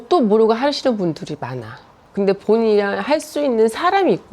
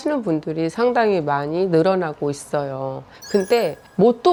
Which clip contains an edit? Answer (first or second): first